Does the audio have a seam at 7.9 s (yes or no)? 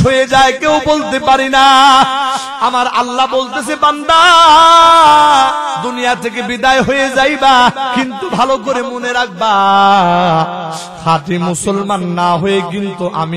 yes